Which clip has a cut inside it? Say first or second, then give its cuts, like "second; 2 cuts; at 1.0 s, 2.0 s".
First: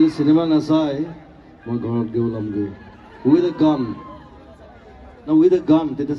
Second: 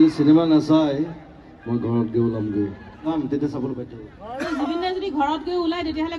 second; 1 cut; at 3.2 s